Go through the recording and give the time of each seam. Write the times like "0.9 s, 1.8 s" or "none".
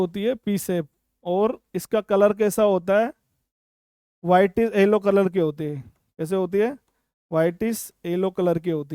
none

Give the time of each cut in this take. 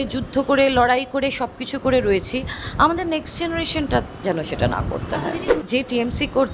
5.6 s

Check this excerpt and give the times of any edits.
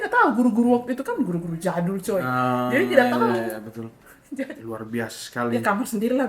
4.5 s

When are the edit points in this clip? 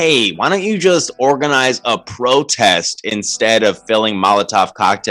none

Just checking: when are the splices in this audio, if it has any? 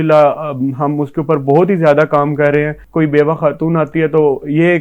2.8 s

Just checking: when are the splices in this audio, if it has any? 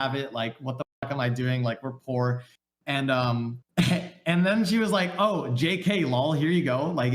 3.6 s

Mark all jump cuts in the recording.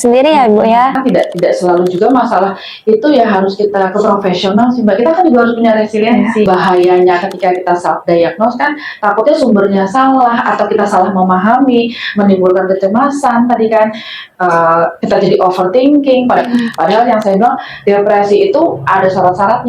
1.0 s, 6.4 s, 16.4 s

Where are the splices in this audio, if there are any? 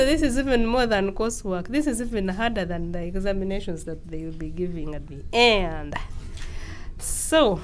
none

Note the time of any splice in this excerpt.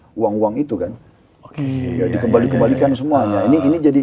none

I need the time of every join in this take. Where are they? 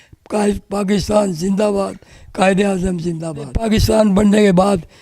3.6 s

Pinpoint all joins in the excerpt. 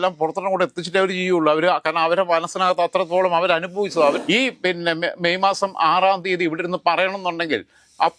4.2 s

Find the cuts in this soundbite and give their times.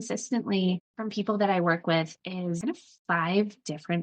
0.9 s, 2.6 s

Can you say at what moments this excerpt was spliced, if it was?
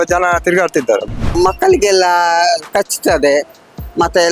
1.3 s

